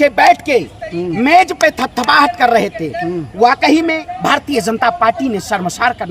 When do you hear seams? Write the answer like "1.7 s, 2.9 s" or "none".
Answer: 4.1 s